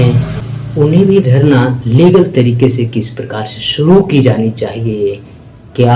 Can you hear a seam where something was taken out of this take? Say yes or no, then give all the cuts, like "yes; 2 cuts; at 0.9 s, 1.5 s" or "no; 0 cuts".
no; 0 cuts